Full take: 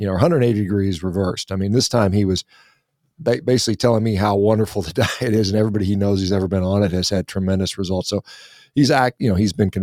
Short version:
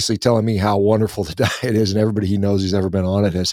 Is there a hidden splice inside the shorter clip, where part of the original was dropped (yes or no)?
no